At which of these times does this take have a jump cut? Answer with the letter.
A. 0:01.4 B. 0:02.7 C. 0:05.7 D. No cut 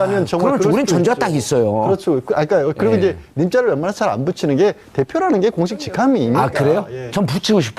B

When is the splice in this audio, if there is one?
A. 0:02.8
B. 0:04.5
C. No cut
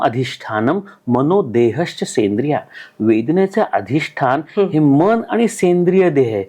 C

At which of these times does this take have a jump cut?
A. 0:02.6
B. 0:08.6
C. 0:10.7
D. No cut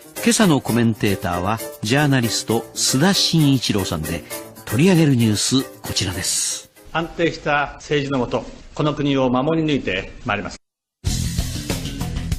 D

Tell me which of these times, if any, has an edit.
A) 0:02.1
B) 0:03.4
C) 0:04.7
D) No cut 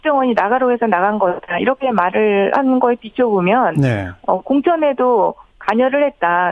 C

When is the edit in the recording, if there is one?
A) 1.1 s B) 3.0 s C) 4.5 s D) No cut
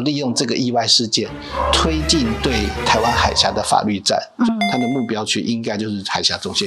C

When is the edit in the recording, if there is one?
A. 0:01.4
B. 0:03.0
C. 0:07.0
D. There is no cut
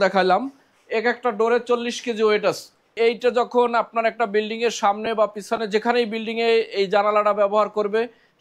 B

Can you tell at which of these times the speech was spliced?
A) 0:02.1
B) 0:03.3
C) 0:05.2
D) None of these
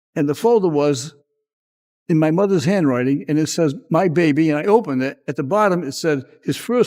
C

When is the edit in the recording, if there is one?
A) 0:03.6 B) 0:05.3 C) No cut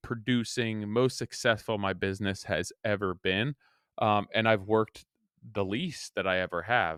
C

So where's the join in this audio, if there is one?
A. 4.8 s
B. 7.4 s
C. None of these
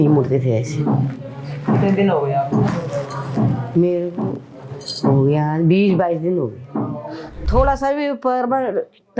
B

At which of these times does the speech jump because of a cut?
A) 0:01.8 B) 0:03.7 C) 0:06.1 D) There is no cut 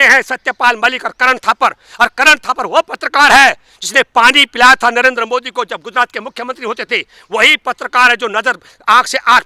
D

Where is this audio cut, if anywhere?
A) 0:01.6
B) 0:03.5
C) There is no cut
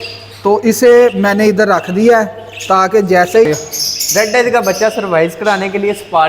B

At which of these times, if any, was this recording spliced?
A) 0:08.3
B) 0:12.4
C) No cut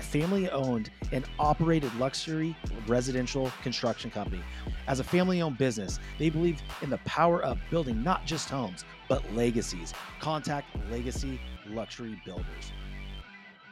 B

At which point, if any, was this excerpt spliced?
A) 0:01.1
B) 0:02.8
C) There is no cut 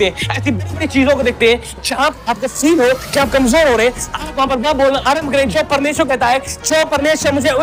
C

